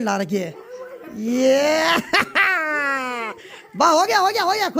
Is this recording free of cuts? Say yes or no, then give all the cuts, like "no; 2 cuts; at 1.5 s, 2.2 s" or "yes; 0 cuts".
yes; 0 cuts